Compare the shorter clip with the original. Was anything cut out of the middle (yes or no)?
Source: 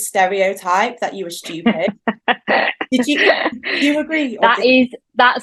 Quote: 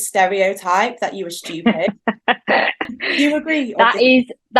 yes